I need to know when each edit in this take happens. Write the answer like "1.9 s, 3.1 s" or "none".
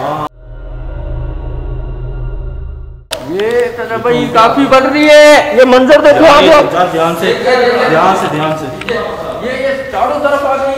2.9 s

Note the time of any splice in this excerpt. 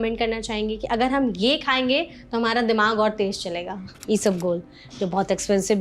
3.9 s

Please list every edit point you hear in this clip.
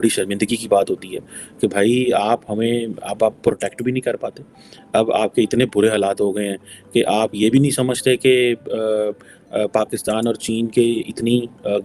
none

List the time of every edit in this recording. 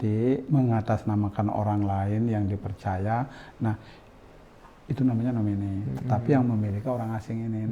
none

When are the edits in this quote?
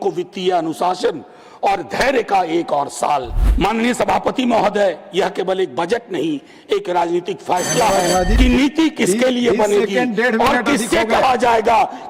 3.4 s, 8.3 s

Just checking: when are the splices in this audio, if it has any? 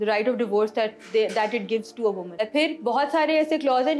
2.4 s

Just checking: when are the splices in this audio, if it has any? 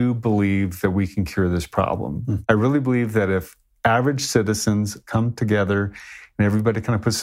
2.3 s, 5.0 s

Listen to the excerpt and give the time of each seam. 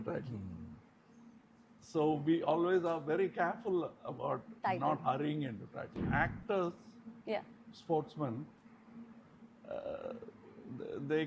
5.8 s

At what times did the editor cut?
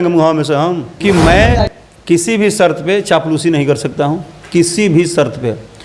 1.0 s

